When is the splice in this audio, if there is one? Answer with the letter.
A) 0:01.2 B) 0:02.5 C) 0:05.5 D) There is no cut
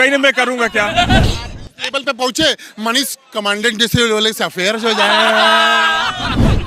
A